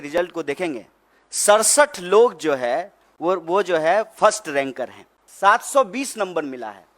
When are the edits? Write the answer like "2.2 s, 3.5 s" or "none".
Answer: 5.2 s